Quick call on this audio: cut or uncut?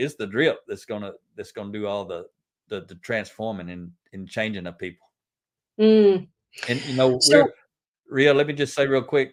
uncut